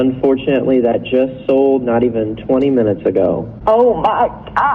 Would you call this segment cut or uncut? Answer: cut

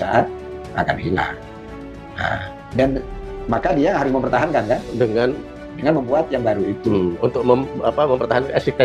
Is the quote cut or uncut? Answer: uncut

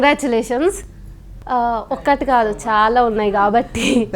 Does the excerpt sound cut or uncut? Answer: uncut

